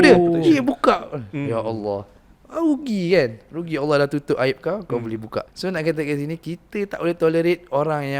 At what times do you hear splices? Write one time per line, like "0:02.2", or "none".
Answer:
0:05.5